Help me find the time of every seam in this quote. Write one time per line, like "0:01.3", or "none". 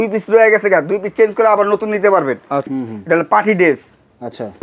0:02.7